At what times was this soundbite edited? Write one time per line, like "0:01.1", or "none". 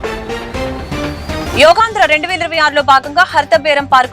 0:01.5